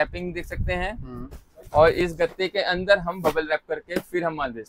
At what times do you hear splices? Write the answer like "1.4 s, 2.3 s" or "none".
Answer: none